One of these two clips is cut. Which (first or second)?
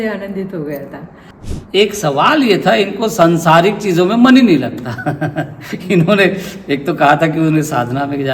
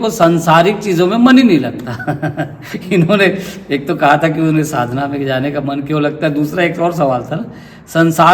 first